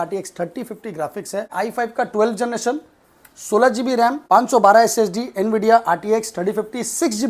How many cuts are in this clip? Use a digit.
2